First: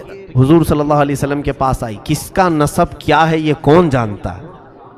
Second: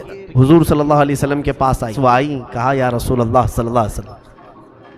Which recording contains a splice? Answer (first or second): second